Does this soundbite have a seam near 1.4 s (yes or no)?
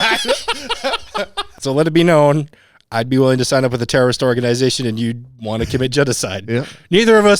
yes